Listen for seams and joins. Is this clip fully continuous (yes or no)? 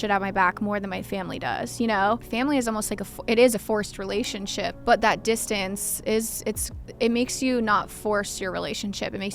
no